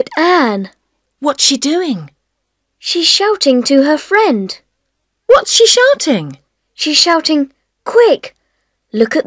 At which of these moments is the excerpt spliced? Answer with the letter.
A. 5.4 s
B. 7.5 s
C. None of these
C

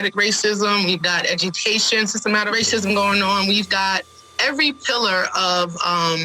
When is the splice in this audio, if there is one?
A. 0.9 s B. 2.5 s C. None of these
B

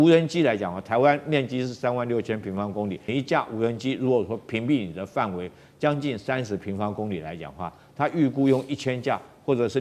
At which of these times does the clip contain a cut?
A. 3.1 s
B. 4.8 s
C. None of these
A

